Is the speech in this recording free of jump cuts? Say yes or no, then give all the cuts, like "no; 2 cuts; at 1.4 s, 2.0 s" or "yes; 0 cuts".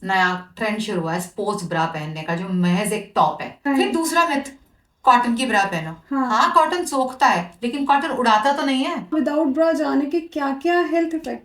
no; 2 cuts; at 3.7 s, 9.1 s